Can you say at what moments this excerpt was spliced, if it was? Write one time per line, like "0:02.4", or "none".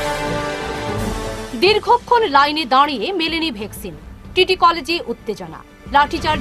none